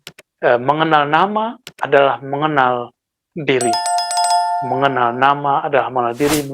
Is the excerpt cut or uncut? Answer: cut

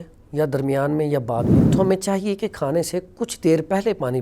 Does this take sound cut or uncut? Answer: cut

